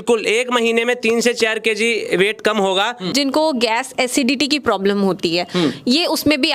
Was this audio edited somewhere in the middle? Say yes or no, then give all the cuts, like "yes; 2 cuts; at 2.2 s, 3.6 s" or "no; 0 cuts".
yes; 1 cut; at 3.1 s